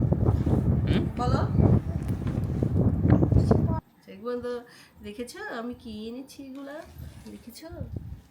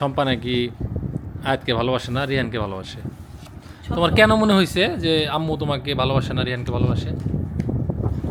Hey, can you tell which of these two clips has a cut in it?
first; 1 cut; at 3.9 s

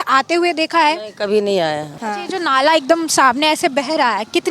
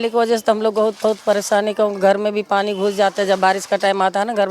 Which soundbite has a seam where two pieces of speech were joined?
first; 1 cut; at 1.9 s

